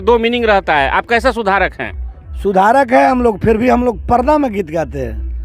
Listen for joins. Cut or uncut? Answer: uncut